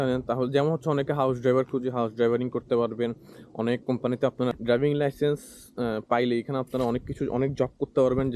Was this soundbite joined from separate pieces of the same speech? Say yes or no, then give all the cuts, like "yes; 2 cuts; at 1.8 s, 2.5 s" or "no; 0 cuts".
yes; 1 cut; at 4.6 s